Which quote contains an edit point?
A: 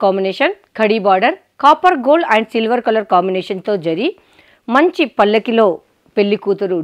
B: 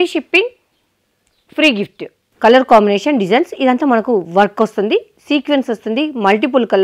B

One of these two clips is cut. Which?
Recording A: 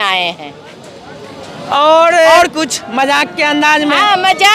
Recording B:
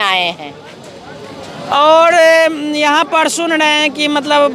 A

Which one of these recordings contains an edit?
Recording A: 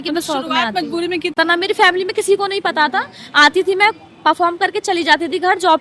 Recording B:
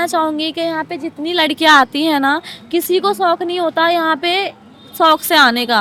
A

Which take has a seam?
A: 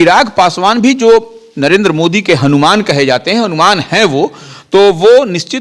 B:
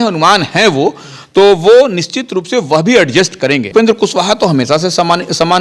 B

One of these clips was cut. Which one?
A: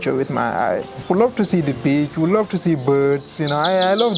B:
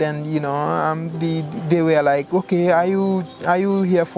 A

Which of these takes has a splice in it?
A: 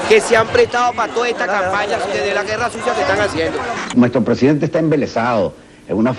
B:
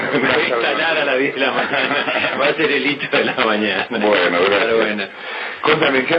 A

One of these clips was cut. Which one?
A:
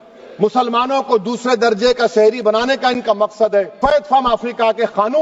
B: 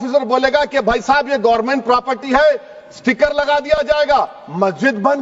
A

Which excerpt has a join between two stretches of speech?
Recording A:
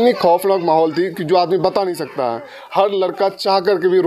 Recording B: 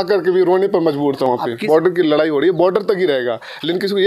B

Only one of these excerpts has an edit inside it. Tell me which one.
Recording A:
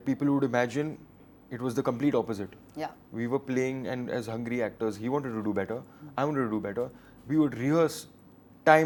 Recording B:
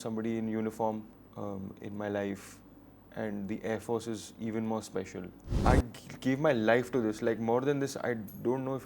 B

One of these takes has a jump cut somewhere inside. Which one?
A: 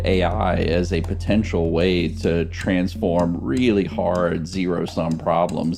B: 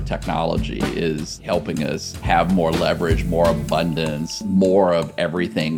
B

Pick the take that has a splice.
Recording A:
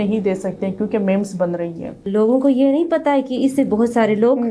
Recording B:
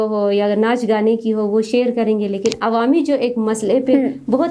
A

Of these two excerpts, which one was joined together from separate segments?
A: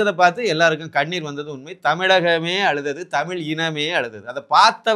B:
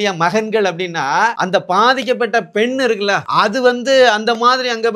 B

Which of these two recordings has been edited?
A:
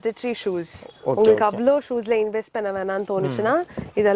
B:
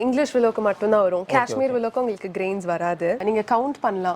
B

